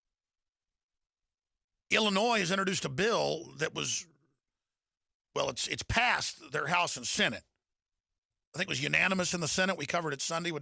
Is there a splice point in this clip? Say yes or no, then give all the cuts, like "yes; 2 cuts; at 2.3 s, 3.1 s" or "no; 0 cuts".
yes; 1 cut; at 5.1 s